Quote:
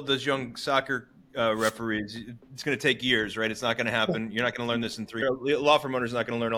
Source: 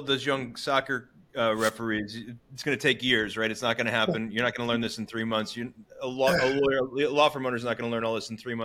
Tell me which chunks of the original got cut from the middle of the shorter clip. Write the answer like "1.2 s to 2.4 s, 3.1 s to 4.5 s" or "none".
5.2 s to 6.7 s